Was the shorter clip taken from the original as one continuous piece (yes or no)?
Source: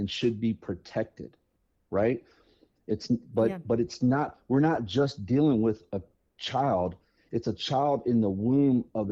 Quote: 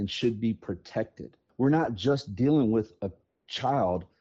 no